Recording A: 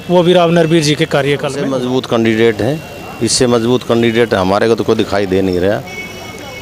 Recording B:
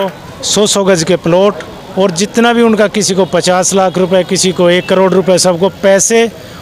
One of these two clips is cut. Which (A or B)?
A